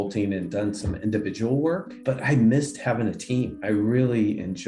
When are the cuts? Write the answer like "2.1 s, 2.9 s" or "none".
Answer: 2.0 s, 3.6 s

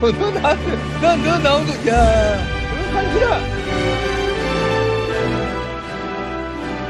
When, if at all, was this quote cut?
2.6 s

